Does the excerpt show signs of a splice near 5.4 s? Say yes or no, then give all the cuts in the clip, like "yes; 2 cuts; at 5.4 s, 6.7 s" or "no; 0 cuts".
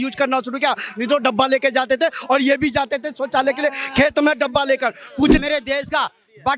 yes; 1 cut; at 5.4 s